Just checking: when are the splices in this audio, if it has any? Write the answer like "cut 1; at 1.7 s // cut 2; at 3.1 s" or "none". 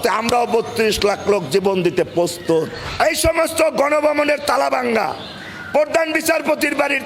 cut 1; at 2.8 s